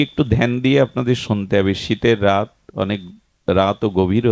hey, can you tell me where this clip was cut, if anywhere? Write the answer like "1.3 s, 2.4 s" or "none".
none

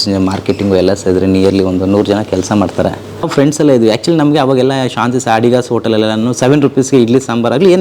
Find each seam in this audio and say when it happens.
3.3 s

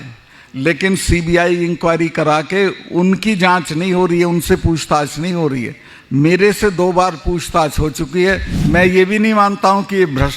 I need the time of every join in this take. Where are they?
8.5 s

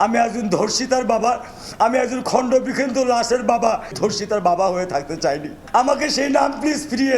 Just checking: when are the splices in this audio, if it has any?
none

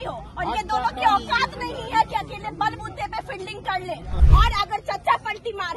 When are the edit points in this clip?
4.1 s

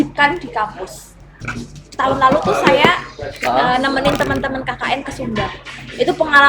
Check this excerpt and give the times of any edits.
1.4 s

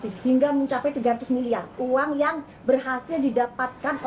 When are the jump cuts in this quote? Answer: 1.8 s

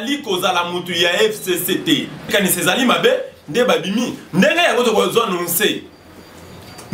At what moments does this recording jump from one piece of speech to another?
2.3 s

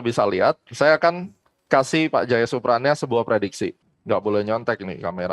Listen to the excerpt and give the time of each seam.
3.8 s

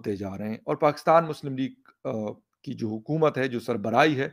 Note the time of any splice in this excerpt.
none

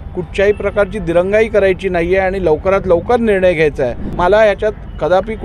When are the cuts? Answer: 4.0 s

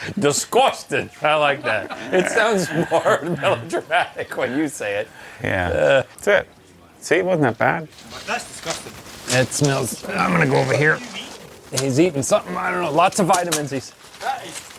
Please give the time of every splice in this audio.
6.2 s, 8.0 s

